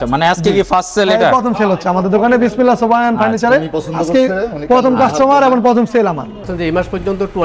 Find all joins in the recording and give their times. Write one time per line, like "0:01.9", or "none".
0:06.5